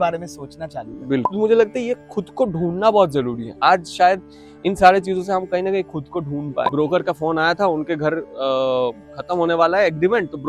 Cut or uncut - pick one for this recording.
cut